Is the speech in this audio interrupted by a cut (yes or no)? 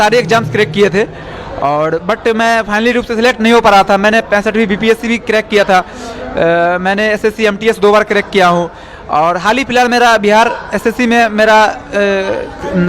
no